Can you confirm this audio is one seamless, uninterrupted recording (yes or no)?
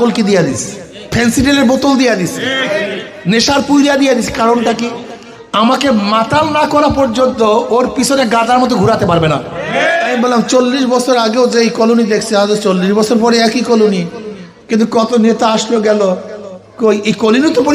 no